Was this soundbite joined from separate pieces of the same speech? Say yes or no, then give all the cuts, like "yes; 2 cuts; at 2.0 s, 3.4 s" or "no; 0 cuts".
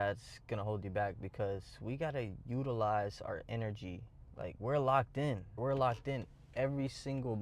yes; 1 cut; at 5.6 s